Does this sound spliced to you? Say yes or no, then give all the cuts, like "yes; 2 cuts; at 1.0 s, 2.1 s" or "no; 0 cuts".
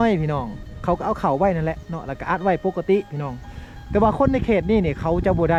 no; 0 cuts